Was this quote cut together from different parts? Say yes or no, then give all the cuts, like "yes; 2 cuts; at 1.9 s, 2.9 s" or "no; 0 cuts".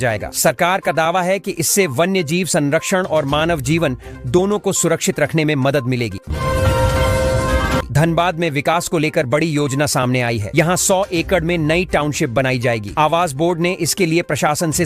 yes; 2 cuts; at 6.2 s, 7.8 s